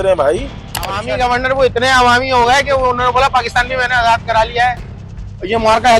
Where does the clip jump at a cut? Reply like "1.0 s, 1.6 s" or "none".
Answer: 1.0 s